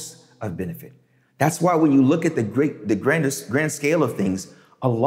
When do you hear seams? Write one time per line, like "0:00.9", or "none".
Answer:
none